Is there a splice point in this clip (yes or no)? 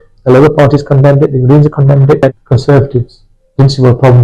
yes